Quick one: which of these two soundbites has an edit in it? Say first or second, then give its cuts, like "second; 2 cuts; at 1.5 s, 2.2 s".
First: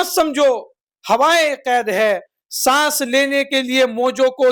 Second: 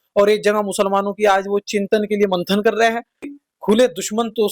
second; 1 cut; at 3.4 s